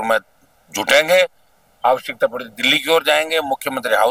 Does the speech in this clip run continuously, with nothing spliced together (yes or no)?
yes